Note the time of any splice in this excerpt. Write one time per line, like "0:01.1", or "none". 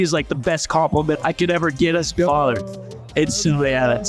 0:01.2